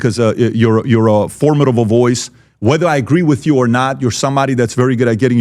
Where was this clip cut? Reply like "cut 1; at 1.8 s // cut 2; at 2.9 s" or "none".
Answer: none